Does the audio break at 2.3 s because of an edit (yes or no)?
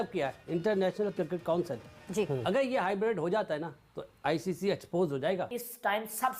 no